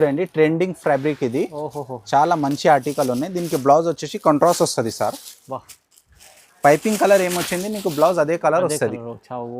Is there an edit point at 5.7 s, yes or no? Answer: no